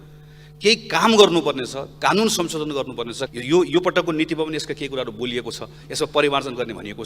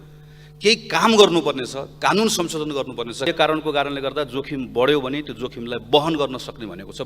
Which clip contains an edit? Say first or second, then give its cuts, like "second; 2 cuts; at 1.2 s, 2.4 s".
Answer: second; 1 cut; at 3.3 s